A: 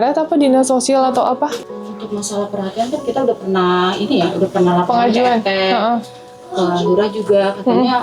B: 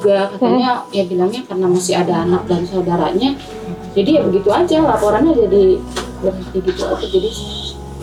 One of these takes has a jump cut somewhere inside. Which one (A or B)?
A